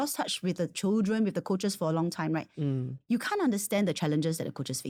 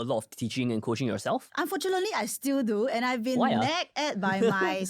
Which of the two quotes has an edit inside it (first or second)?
second